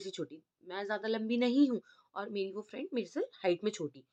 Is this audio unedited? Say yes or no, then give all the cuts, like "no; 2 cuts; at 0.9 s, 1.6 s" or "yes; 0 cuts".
yes; 0 cuts